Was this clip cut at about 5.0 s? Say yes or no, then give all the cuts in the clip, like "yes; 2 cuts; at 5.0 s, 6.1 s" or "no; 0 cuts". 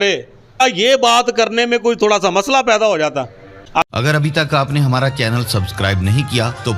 no; 1 cut; at 3.8 s